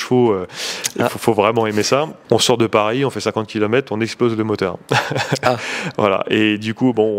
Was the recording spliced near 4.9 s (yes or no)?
no